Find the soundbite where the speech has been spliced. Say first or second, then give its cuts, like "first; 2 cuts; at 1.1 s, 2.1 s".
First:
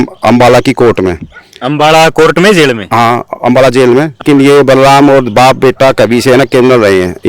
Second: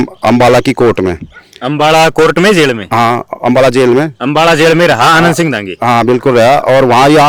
first; 1 cut; at 4.2 s